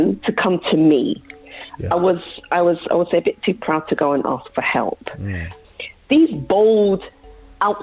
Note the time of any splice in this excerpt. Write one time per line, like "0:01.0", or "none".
0:05.5